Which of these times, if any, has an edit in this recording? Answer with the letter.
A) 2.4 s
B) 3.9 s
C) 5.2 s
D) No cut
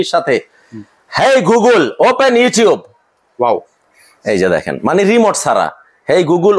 D